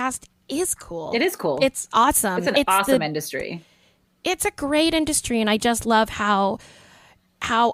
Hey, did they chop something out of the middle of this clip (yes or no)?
no